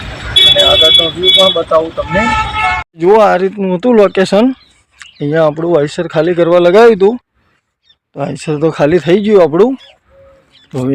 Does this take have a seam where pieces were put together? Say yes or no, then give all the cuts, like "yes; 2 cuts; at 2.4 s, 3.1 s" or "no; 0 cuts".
yes; 1 cut; at 2.8 s